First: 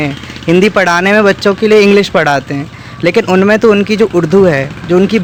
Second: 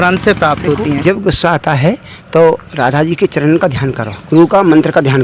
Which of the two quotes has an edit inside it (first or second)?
second